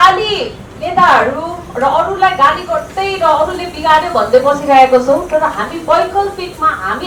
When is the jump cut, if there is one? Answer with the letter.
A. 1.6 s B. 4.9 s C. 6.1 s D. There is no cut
D